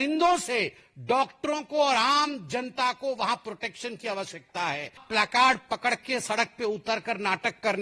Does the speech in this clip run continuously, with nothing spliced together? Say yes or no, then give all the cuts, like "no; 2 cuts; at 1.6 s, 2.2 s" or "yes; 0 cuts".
no; 1 cut; at 5.0 s